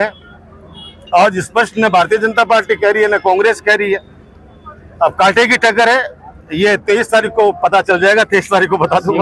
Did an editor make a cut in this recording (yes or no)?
no